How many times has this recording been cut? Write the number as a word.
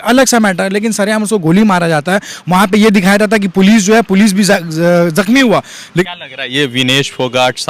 one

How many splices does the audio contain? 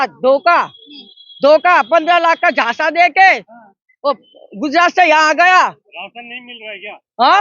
zero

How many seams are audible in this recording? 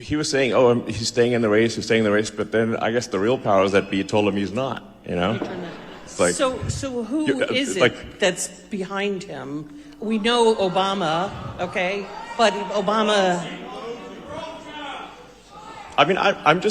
zero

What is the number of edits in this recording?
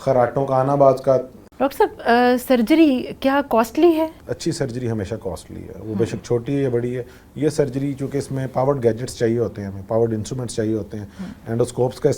two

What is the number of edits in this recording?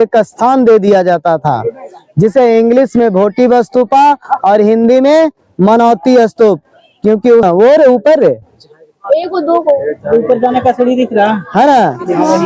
one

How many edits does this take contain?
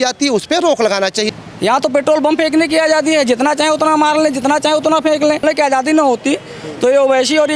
two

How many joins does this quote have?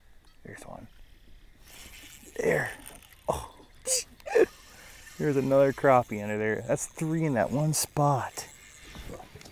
zero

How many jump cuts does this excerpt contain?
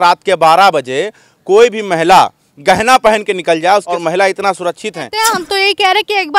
two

